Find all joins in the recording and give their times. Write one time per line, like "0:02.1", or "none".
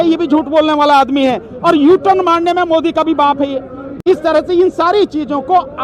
none